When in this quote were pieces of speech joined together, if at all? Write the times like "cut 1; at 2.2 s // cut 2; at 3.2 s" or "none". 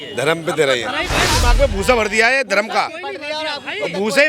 cut 1; at 1.4 s